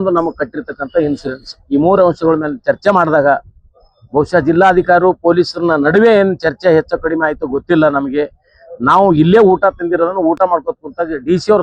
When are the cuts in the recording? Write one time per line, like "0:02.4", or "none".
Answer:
none